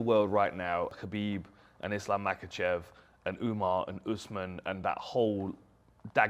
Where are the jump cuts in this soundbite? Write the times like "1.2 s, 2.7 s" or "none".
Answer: 0.9 s